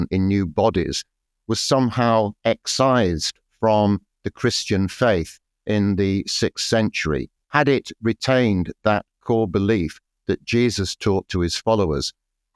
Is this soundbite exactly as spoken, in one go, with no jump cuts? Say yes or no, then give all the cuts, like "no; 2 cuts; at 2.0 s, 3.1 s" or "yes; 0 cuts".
no; 2 cuts; at 5.7 s, 7.4 s